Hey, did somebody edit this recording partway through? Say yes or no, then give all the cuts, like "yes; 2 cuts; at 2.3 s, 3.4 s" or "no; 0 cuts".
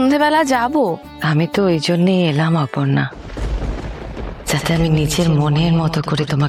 no; 0 cuts